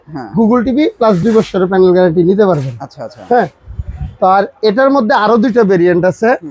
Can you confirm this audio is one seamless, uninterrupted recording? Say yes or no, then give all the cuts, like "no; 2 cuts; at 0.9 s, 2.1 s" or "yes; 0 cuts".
yes; 0 cuts